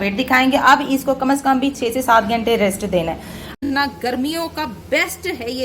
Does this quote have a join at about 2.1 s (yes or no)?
no